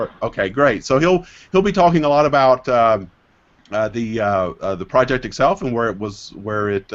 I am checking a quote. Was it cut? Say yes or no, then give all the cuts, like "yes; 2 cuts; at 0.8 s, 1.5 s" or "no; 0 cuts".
yes; 1 cut; at 4.5 s